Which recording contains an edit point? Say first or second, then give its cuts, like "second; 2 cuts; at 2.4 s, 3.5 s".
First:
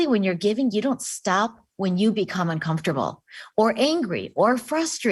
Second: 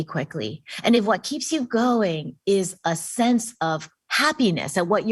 second; 1 cut; at 1.0 s